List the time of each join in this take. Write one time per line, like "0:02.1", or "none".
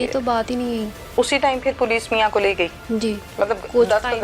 0:00.9
0:02.8